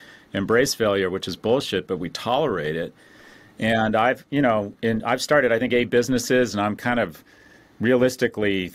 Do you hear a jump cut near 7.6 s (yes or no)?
no